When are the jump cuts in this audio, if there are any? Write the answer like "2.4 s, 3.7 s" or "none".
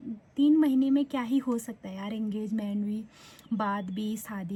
none